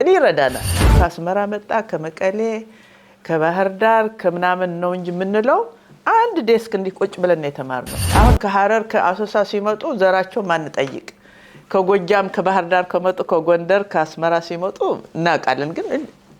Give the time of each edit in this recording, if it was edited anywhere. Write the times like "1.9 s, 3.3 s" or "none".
0.9 s, 7.9 s